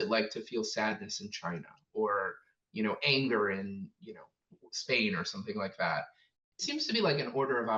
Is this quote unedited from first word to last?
no; 1 cut; at 6.4 s

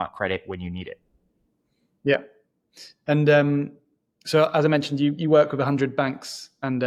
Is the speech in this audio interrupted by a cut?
no; 0 cuts

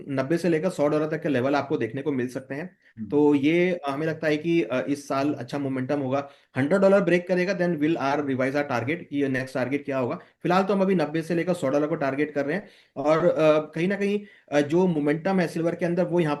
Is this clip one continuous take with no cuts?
yes; 0 cuts

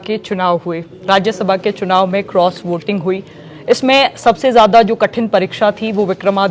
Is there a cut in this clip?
no; 0 cuts

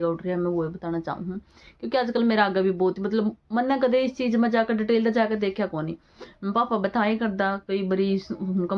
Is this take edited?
no; 0 cuts

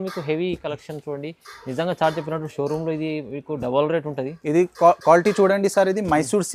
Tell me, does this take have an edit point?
no; 0 cuts

